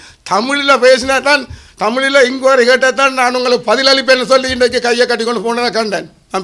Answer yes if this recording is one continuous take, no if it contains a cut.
yes